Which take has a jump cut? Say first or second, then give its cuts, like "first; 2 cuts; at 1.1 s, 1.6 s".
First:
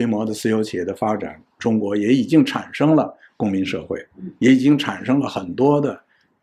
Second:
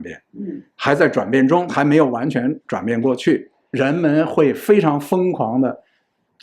second; 1 cut; at 3.6 s